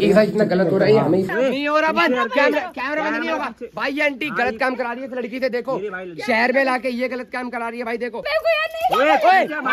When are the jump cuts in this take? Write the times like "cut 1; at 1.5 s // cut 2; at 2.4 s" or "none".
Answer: cut 1; at 1.3 s // cut 2; at 8.2 s